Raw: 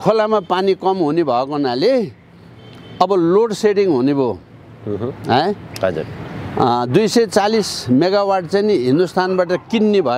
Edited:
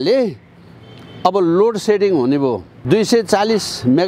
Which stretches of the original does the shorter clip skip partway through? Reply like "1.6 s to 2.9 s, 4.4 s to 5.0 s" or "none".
4.6 s to 6.9 s